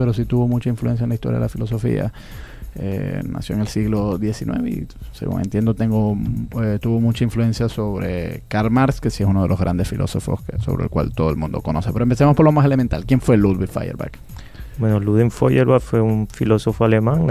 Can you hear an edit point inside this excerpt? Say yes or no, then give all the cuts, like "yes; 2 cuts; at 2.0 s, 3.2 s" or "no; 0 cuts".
no; 0 cuts